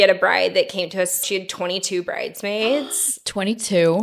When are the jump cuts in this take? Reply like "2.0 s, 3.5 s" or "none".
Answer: 1.2 s